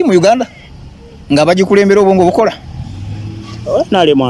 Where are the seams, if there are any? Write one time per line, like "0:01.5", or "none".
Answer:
none